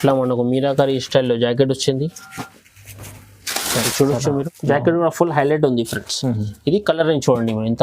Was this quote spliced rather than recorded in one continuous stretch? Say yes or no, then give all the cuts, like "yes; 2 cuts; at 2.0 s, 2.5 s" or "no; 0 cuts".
yes; 1 cut; at 4.5 s